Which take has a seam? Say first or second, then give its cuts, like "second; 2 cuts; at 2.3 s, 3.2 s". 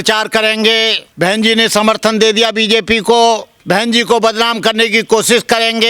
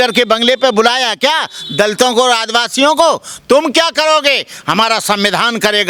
first; 2 cuts; at 1.0 s, 3.5 s